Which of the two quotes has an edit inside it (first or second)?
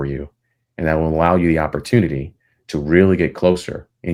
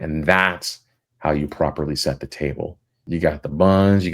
second